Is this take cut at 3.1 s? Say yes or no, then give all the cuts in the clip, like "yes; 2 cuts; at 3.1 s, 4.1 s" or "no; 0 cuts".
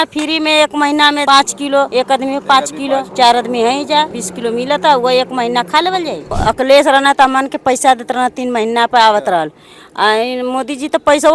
yes; 4 cuts; at 1.7 s, 3.1 s, 4.2 s, 6.3 s